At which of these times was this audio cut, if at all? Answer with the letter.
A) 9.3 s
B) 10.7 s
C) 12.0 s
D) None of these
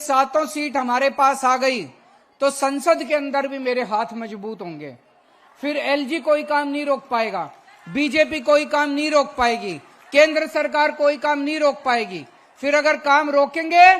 D